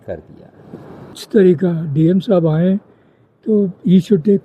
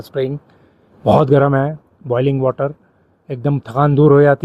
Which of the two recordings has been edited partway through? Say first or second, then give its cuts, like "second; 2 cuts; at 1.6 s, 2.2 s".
first; 1 cut; at 1.2 s